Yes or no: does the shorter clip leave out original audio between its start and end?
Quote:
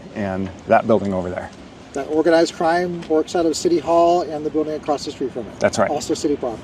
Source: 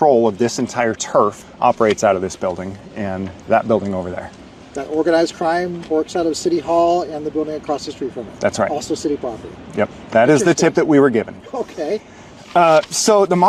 no